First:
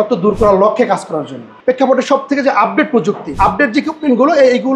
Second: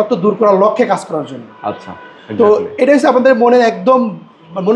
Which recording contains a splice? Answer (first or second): first